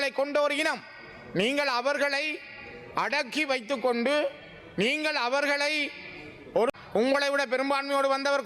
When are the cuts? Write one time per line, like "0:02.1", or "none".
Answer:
0:06.7